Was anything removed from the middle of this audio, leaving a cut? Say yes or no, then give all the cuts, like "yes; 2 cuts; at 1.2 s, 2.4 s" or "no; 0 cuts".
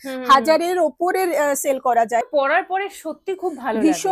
yes; 1 cut; at 2.2 s